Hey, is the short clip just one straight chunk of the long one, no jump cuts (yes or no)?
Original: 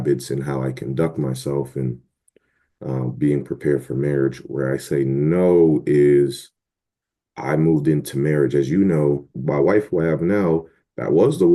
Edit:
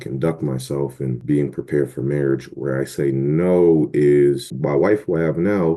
no